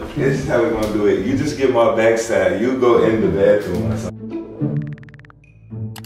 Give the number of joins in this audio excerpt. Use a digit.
1